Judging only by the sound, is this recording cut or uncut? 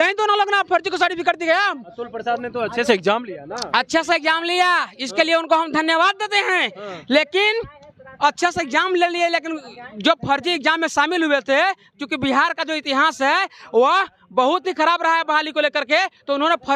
uncut